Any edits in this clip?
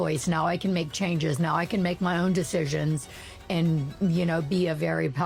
no; 0 cuts

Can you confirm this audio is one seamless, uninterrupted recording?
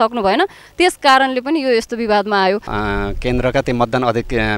no; 1 cut; at 2.7 s

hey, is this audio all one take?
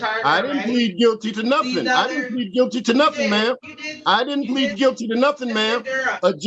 yes; 0 cuts

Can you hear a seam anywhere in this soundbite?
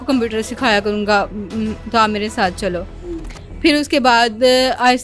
no; 0 cuts

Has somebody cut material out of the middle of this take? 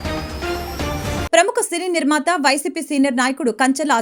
yes; 1 cut; at 1.3 s

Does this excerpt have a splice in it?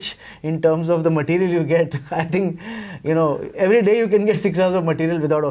no; 0 cuts

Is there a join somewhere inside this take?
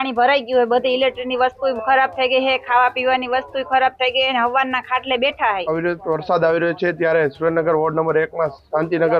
yes; 1 cut; at 5.6 s

